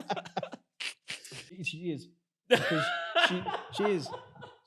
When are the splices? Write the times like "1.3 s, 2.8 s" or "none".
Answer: 1.5 s